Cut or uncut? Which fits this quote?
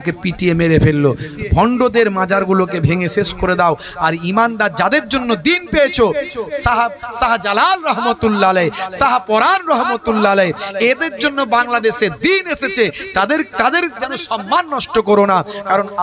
cut